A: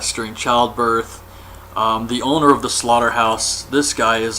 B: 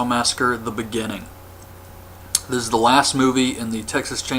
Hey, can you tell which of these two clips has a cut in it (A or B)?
A